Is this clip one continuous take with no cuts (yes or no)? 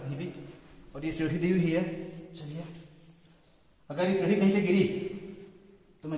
yes